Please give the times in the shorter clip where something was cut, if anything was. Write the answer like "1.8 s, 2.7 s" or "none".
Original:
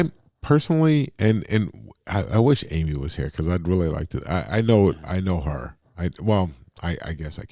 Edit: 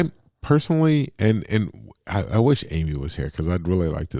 none